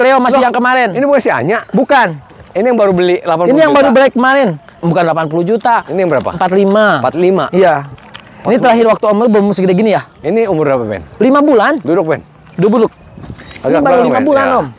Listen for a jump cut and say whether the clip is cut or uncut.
uncut